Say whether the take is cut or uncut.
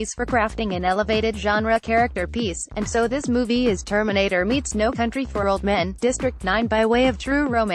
uncut